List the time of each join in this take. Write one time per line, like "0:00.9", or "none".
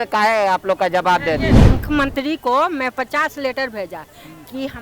0:01.6